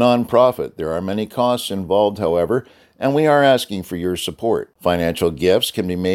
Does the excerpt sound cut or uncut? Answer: uncut